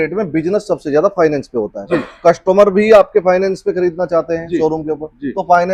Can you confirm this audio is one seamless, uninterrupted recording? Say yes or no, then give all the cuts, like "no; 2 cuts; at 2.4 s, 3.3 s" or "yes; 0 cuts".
yes; 0 cuts